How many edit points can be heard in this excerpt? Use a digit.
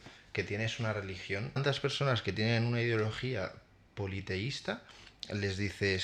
1